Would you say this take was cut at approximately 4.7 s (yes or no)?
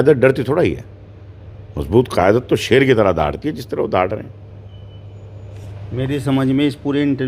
no